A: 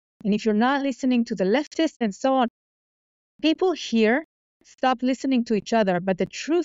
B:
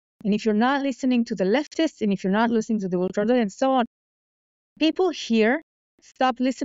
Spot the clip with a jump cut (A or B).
A